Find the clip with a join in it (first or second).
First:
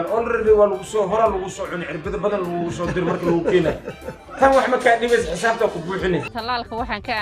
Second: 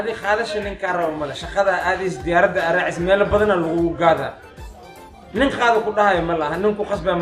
first